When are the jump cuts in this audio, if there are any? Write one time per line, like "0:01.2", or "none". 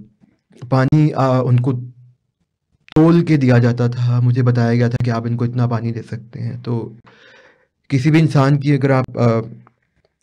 none